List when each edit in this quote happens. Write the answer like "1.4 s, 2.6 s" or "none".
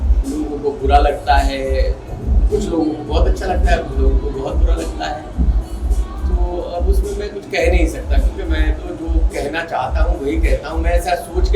none